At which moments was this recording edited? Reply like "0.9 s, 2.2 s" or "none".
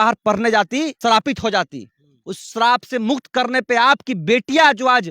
1.0 s